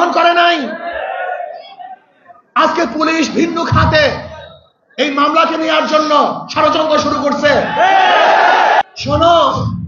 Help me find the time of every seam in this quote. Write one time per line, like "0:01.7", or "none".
0:08.8